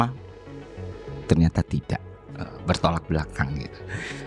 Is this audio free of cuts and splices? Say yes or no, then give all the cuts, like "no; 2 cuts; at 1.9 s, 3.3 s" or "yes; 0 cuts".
yes; 0 cuts